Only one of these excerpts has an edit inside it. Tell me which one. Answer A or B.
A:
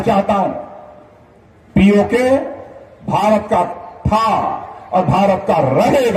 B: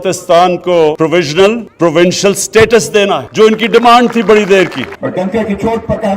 B